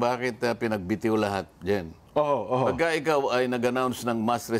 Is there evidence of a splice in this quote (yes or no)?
yes